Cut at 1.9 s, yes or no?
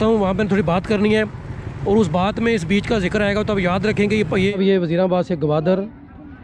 no